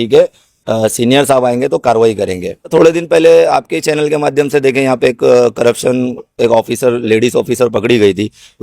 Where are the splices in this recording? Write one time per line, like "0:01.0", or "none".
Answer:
0:02.7